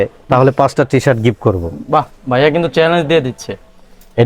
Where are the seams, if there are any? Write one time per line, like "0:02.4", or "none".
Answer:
none